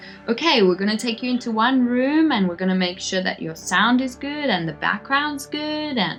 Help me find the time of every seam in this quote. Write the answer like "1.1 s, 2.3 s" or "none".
none